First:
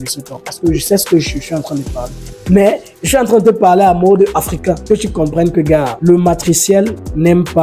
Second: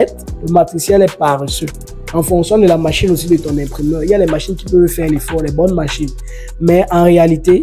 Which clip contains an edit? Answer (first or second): first